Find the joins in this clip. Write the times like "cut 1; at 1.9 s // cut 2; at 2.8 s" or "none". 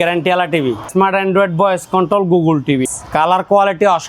cut 1; at 0.9 s // cut 2; at 3.0 s